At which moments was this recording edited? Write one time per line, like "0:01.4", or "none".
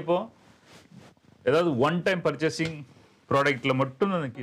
none